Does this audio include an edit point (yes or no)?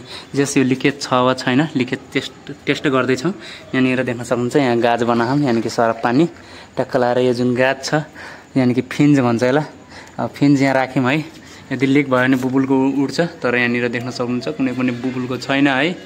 no